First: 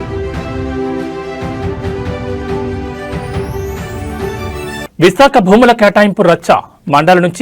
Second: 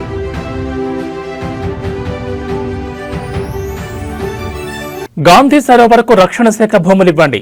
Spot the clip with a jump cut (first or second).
first